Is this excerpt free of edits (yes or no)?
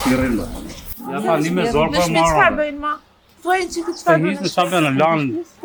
yes